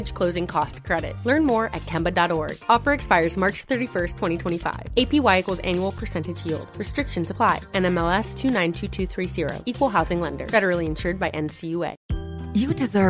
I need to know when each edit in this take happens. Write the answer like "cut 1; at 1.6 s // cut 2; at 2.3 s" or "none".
cut 1; at 12.0 s

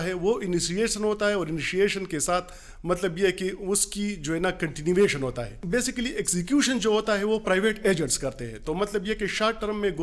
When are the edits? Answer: cut 1; at 5.5 s

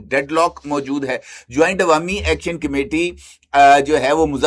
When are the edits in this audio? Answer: none

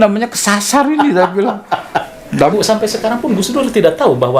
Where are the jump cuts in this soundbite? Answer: cut 1; at 2.5 s

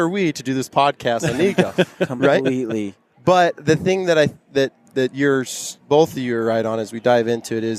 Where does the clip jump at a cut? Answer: none

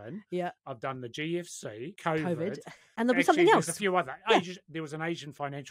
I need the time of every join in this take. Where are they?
cut 1; at 1.9 s // cut 2; at 2.8 s

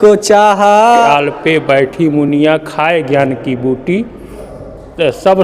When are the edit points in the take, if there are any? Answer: cut 1; at 1.1 s

